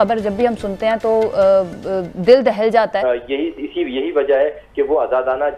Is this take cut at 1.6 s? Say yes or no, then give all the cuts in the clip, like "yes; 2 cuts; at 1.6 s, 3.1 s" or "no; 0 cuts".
no; 1 cut; at 3.0 s